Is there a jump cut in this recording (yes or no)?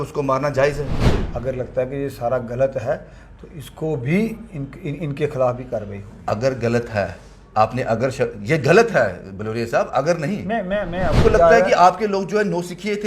yes